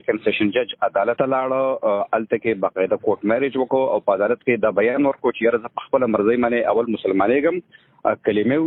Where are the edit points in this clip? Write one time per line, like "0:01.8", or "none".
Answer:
0:01.2